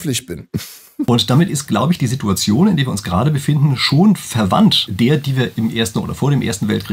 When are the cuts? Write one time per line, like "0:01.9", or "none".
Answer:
0:01.1
0:04.8